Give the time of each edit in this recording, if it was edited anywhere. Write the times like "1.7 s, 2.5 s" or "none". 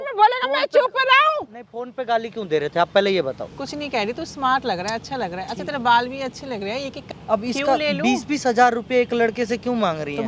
3.5 s, 7.1 s